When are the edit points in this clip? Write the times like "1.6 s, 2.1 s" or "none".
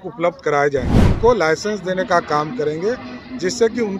1.1 s

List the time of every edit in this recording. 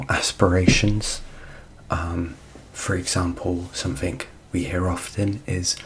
none

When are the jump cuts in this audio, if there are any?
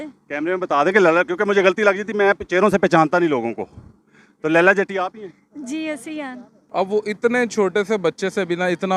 6.5 s

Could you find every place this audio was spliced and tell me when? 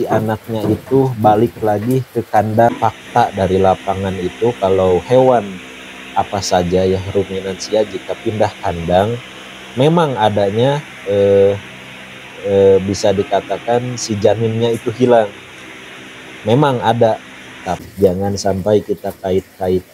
2.7 s, 17.7 s

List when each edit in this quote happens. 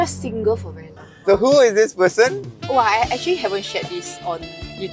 1.1 s

